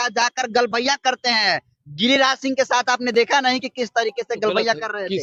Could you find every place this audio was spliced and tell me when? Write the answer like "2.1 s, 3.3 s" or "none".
none

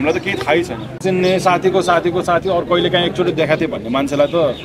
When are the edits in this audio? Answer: 1.0 s

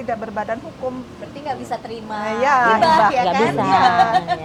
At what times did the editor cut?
none

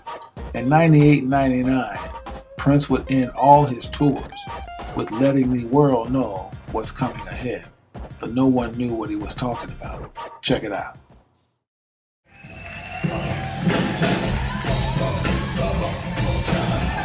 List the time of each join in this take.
9.2 s

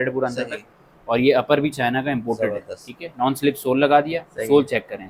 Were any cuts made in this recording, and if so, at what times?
none

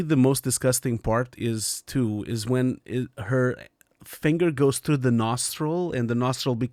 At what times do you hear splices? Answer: none

